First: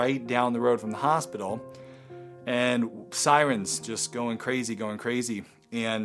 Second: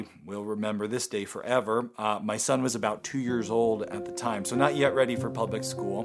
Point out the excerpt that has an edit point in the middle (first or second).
second